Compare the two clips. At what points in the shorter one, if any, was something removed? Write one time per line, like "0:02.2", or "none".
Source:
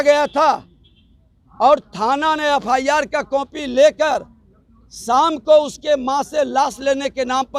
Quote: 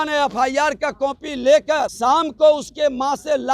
0:01.9